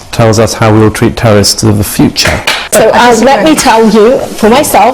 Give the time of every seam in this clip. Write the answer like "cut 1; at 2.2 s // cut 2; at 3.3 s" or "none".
cut 1; at 2.5 s